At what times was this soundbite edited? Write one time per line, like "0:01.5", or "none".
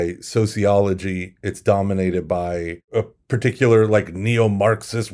0:02.8